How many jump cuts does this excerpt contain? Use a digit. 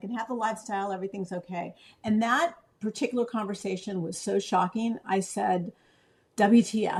0